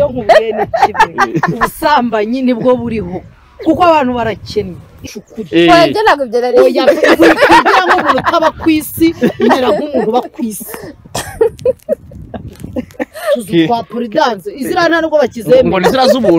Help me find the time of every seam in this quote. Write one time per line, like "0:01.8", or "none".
0:05.0